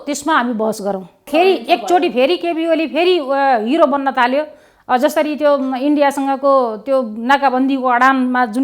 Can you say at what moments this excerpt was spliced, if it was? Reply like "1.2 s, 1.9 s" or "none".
1.3 s